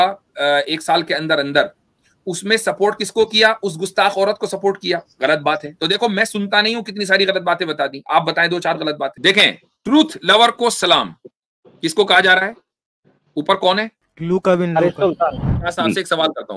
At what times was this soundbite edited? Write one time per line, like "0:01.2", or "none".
0:09.1
0:14.0
0:15.6